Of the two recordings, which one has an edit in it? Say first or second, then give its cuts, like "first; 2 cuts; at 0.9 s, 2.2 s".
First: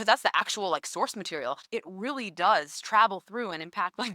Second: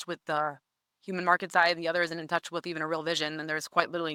first; 1 cut; at 1.6 s